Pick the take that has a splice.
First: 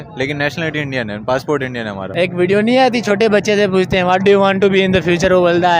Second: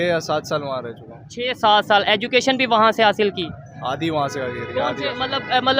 first; 1 cut; at 2.1 s

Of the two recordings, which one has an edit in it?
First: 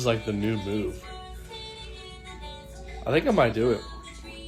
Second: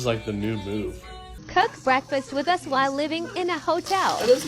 second; 1 cut; at 1.4 s

